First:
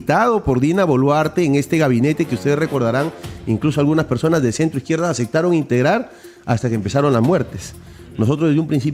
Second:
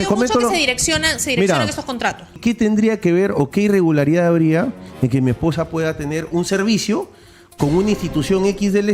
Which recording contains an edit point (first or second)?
second